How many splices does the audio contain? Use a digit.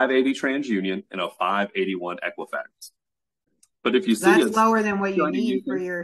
1